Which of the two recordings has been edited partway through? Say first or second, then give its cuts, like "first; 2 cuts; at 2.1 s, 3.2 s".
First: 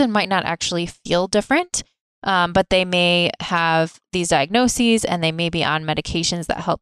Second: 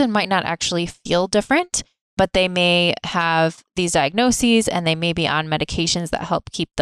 second; 1 cut; at 2.1 s